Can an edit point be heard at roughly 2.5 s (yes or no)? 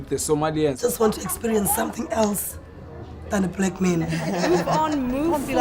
no